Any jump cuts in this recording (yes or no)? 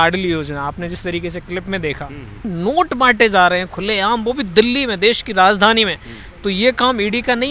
yes